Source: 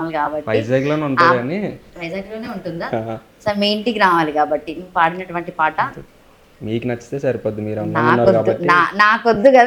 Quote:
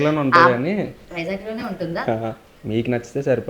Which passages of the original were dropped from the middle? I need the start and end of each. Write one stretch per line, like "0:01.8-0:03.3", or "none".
0:03.3-0:06.4